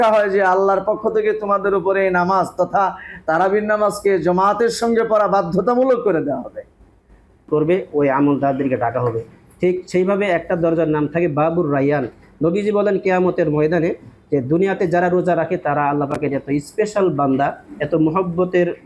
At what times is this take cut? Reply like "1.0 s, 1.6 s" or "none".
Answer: 7.5 s